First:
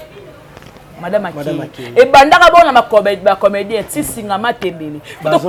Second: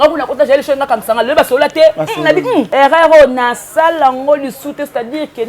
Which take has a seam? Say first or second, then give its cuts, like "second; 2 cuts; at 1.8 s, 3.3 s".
second; 1 cut; at 2.7 s